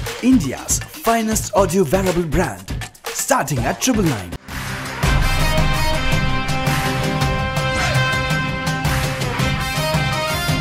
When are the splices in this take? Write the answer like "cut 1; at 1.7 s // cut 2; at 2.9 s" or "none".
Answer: none